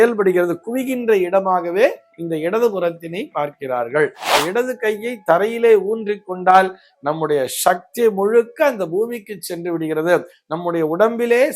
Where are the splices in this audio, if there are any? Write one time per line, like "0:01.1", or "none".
0:04.3